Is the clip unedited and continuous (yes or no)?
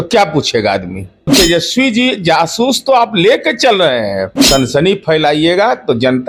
no